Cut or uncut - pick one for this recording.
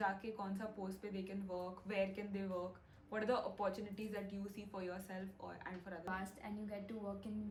uncut